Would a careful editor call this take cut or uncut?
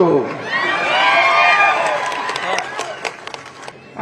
uncut